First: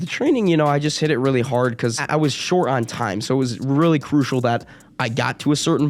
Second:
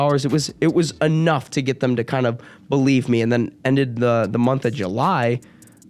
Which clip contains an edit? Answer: first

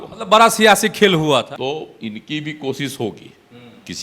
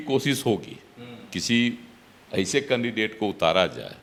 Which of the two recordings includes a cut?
first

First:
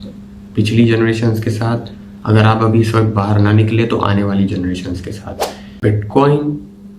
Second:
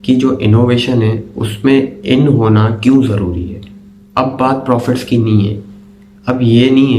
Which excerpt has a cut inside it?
first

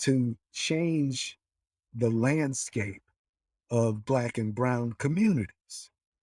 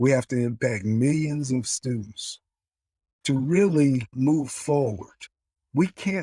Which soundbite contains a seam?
second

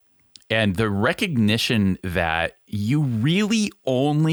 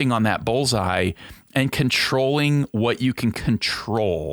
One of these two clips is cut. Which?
second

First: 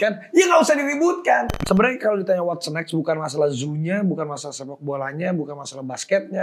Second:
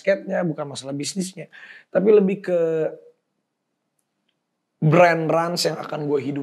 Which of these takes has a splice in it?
first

